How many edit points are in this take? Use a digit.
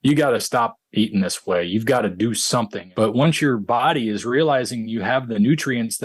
1